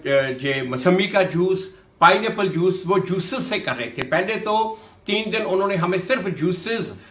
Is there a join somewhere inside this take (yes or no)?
no